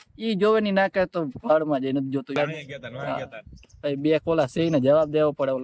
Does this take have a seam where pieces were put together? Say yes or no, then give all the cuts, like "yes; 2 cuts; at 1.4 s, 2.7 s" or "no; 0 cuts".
yes; 1 cut; at 2.4 s